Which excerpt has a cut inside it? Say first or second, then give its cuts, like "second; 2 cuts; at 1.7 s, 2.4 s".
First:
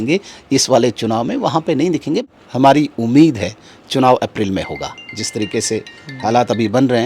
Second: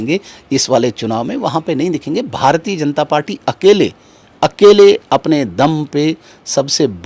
first; 1 cut; at 2.3 s